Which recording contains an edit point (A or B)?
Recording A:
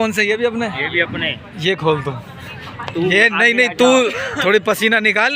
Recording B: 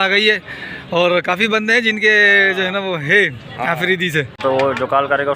B